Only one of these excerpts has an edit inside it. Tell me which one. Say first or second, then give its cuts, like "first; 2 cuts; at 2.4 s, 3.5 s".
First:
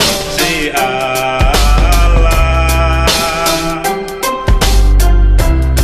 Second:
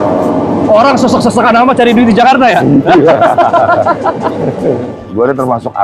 second; 1 cut; at 4.9 s